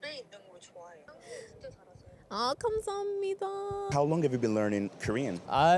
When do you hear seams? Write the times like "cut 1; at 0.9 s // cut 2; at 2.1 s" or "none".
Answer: cut 1; at 1.3 s // cut 2; at 3.9 s